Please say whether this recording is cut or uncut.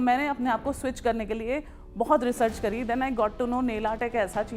uncut